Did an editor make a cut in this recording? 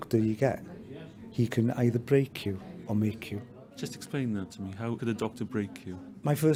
no; 0 cuts

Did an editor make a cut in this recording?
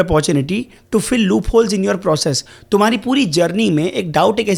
no; 0 cuts

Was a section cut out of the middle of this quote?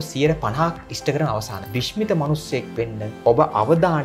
yes; 2 cuts; at 1.6 s, 3.0 s

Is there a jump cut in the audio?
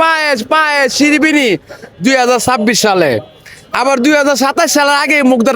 no; 0 cuts

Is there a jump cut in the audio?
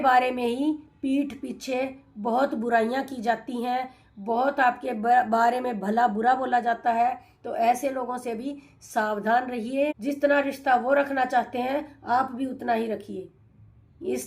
yes; 1 cut; at 10.0 s

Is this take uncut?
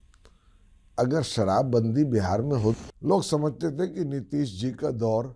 no; 1 cut; at 2.8 s

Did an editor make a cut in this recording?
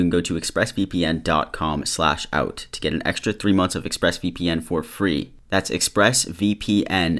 no; 0 cuts

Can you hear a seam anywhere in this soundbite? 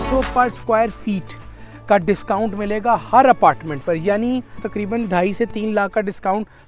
yes; 1 cut; at 4.6 s

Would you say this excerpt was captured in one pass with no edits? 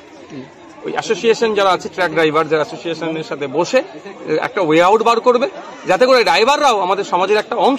yes; 0 cuts

